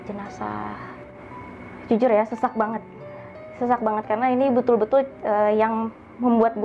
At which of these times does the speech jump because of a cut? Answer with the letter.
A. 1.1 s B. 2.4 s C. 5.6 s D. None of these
A